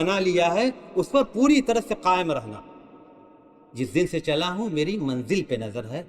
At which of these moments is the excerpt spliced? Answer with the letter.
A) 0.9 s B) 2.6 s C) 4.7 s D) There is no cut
D